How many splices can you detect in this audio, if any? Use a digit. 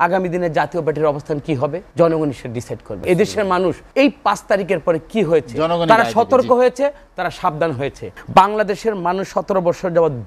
4